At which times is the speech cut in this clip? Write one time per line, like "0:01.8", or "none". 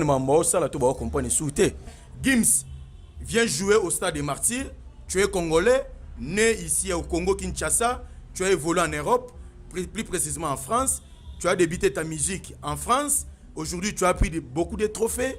0:02.0